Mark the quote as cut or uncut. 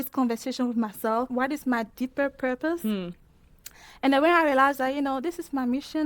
cut